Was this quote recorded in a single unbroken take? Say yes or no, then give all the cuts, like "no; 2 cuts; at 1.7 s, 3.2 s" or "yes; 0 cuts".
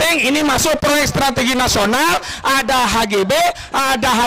yes; 0 cuts